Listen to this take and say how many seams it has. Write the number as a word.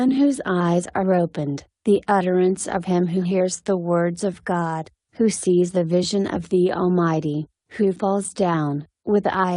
one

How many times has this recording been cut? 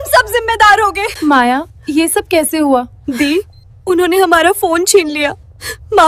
three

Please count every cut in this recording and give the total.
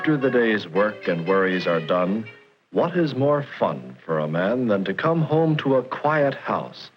one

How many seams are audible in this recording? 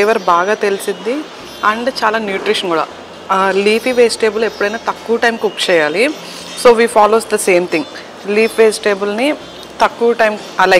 zero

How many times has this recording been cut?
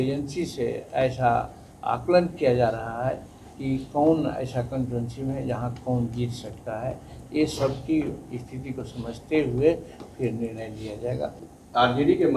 one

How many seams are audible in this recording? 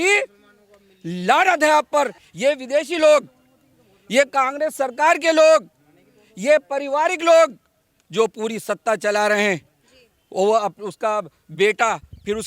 one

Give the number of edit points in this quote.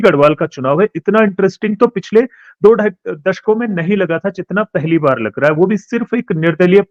zero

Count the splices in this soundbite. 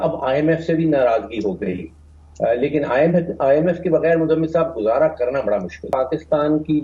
one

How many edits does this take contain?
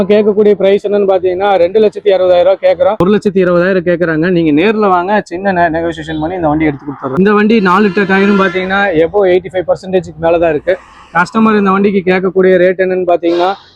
two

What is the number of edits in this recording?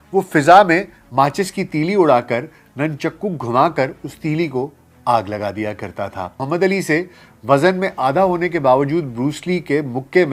one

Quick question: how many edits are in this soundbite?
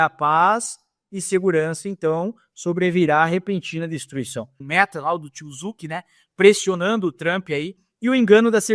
two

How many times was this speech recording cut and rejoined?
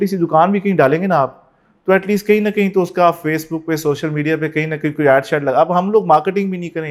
zero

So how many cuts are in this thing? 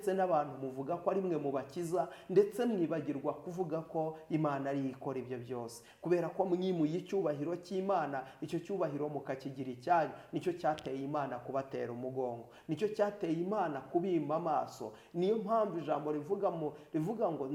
zero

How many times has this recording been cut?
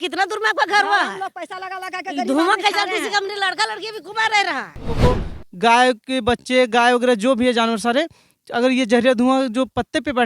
one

